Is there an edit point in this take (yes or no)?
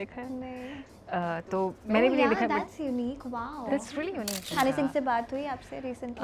yes